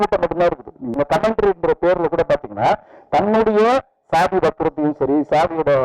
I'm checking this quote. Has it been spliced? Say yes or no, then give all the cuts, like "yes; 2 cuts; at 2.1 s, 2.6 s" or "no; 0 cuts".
yes; 1 cut; at 1.0 s